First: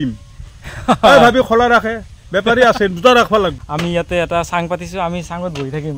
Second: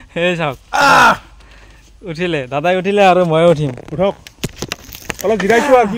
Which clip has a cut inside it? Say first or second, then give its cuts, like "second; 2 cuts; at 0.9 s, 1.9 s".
first; 1 cut; at 3.7 s